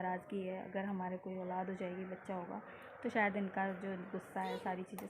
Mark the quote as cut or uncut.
uncut